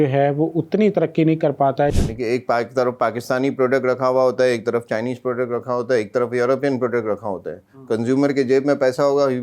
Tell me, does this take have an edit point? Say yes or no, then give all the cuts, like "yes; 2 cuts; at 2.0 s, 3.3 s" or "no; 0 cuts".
yes; 1 cut; at 1.9 s